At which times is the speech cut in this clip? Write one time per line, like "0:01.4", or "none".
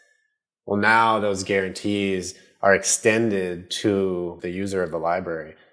0:04.4